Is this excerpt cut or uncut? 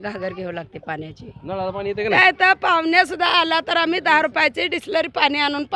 cut